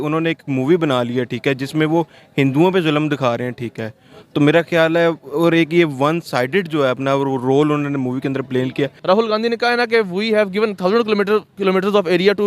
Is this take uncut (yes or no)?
no